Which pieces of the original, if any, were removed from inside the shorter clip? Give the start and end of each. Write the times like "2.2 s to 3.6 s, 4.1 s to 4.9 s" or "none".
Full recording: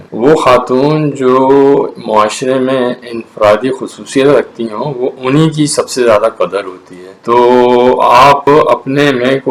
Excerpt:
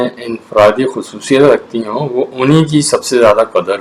none